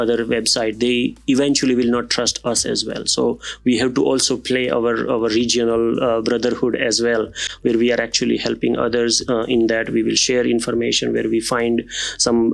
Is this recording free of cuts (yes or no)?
yes